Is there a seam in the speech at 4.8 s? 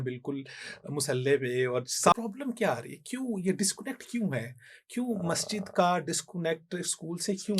no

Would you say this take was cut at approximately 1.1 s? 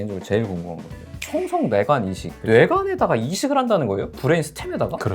no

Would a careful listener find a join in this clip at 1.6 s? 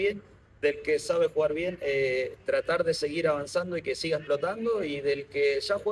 no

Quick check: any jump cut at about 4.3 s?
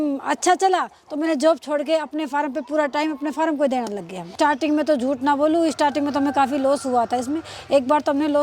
yes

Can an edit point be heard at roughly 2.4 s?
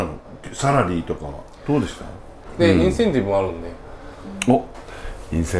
yes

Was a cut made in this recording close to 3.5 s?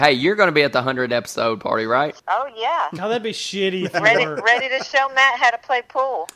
no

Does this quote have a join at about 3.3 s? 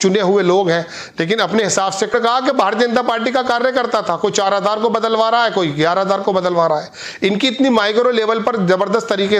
no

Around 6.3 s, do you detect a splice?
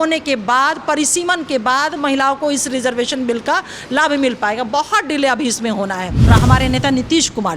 yes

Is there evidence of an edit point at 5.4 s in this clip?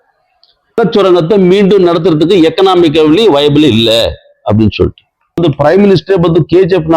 yes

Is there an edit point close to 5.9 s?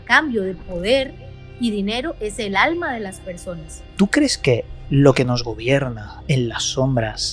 no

